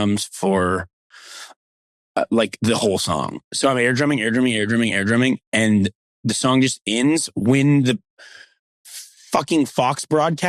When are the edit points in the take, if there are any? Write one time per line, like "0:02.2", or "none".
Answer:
none

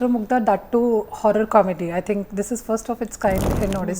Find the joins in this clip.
0:01.5

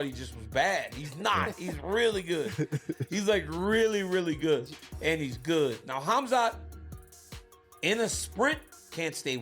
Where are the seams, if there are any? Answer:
none

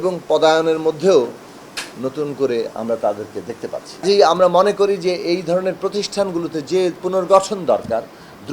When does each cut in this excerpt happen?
0:04.0

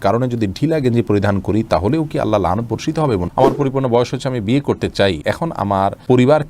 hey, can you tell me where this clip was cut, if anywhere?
0:03.3
0:05.6

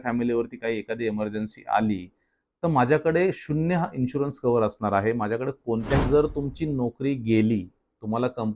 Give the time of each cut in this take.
0:06.0

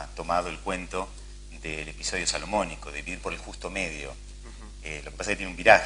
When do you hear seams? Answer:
0:04.7

